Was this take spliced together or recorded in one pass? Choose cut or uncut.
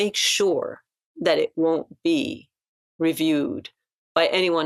uncut